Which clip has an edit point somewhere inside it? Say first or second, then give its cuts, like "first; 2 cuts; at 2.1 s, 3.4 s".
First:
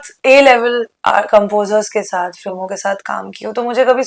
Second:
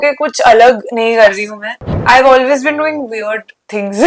second; 1 cut; at 2.0 s